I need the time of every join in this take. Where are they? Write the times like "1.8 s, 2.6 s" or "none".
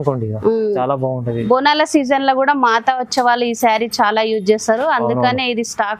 none